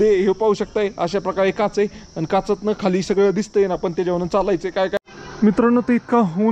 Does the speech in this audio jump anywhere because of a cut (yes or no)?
yes